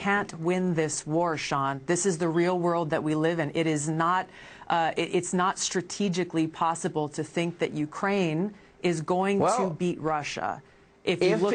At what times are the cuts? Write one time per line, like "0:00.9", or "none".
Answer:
0:07.0

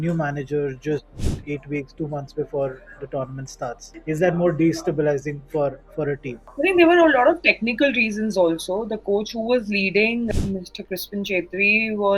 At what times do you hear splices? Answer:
0:03.9

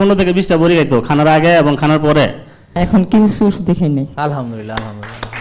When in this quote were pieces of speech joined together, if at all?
0:02.8

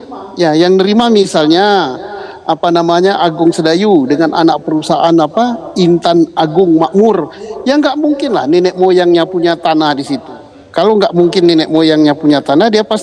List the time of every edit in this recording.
none

